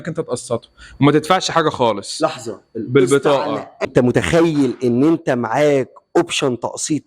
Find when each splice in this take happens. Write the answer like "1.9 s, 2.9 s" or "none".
3.9 s